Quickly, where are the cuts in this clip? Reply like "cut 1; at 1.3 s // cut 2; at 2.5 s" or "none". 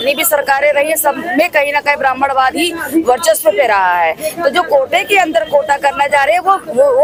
none